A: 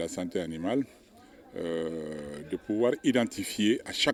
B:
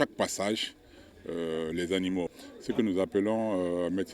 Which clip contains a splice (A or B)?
B